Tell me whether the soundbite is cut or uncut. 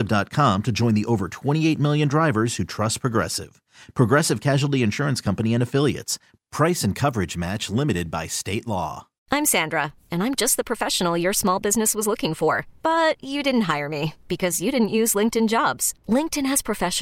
cut